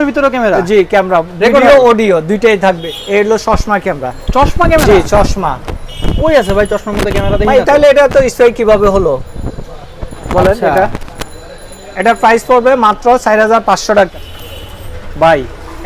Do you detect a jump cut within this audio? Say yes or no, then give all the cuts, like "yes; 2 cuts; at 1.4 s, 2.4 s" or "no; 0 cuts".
yes; 2 cuts; at 2.9 s, 14.1 s